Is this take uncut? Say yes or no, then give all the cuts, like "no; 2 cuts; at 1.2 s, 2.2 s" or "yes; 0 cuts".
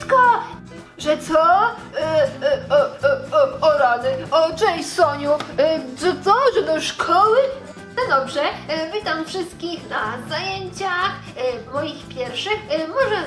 no; 2 cuts; at 0.7 s, 7.6 s